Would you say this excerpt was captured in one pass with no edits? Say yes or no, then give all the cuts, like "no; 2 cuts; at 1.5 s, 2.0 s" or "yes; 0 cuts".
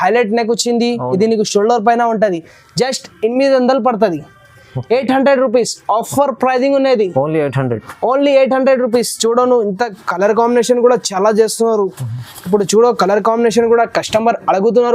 yes; 0 cuts